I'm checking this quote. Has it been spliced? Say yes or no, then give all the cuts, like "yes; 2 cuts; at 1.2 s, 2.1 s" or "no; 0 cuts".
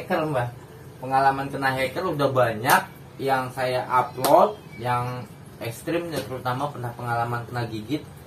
no; 0 cuts